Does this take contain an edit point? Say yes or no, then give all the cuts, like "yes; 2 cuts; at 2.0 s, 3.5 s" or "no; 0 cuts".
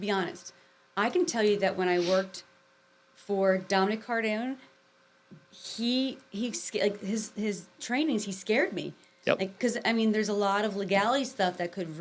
no; 0 cuts